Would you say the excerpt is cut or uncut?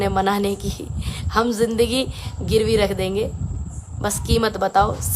uncut